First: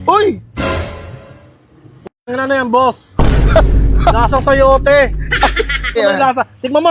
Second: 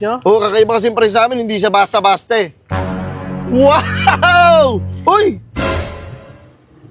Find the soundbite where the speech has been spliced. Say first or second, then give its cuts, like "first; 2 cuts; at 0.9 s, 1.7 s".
first; 1 cut; at 6.0 s